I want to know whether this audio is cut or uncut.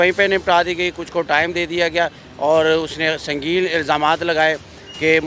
cut